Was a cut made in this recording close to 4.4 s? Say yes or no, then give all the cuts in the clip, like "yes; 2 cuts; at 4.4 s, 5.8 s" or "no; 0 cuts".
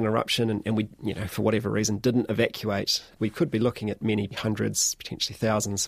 yes; 2 cuts; at 3.1 s, 4.4 s